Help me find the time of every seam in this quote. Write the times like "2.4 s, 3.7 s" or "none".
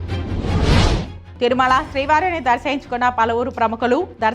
none